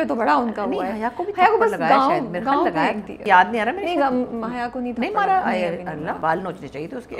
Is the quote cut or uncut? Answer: cut